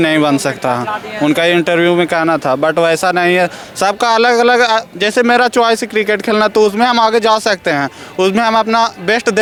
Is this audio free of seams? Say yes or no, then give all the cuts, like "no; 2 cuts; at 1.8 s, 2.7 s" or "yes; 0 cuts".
yes; 0 cuts